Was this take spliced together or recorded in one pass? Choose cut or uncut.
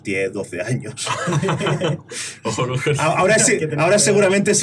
uncut